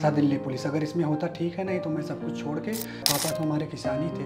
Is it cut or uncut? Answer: cut